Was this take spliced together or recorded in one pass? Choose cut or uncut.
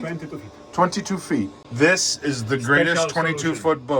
cut